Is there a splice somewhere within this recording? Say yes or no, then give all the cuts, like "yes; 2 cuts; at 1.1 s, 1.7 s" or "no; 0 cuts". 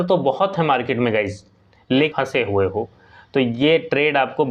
yes; 1 cut; at 2.1 s